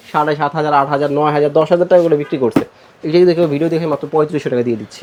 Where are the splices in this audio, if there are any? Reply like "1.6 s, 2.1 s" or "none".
none